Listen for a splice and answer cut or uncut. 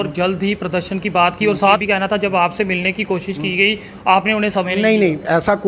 cut